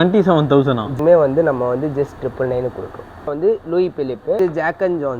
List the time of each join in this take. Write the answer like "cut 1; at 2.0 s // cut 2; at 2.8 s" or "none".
cut 1; at 0.9 s // cut 2; at 3.2 s // cut 3; at 4.4 s